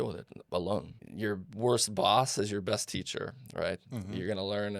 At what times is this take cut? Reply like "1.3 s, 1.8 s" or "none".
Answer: 1.0 s